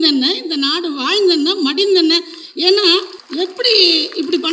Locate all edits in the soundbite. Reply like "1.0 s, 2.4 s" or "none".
3.2 s